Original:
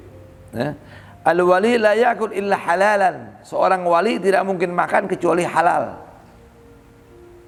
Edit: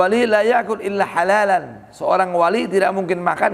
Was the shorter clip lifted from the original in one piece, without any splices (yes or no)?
yes